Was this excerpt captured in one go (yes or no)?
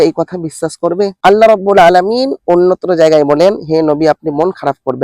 no